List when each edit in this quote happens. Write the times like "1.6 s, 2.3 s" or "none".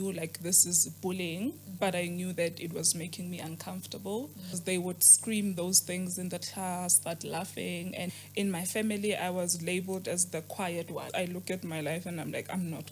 4.6 s, 7.0 s, 8.1 s, 11.1 s